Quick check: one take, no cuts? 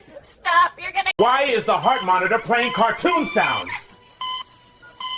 yes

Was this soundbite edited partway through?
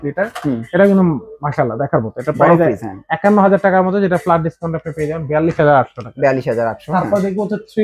no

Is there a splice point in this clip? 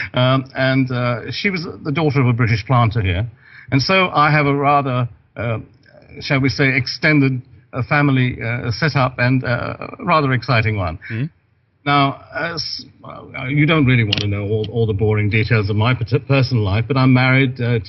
yes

